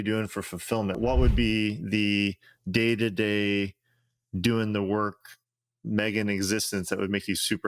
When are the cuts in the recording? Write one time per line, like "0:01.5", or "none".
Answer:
none